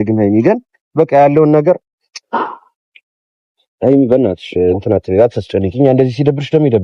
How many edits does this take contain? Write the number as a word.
zero